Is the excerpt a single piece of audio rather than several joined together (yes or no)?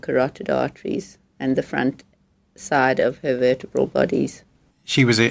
no